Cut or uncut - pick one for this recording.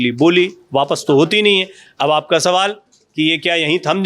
uncut